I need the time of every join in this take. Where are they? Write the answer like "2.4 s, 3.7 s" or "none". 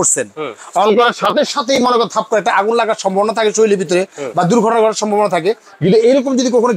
none

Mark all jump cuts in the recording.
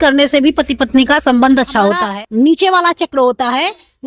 2.0 s

